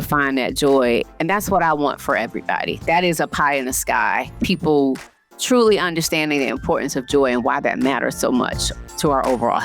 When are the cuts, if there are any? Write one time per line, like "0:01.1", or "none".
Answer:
0:01.1
0:04.4